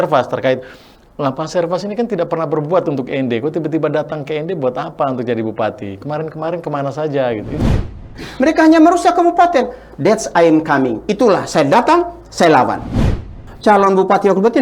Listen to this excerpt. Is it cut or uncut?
cut